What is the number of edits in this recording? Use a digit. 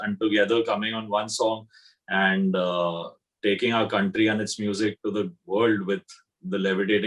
0